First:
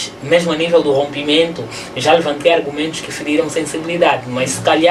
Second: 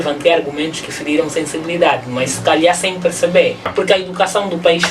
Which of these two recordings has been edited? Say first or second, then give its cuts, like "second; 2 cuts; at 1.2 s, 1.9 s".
second; 1 cut; at 3.7 s